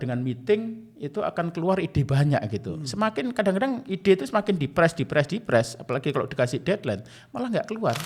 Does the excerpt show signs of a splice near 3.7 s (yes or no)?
no